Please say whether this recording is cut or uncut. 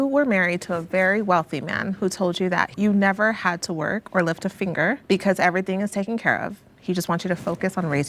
cut